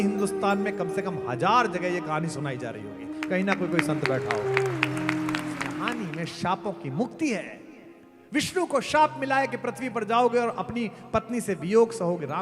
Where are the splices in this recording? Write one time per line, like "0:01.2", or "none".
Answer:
0:05.9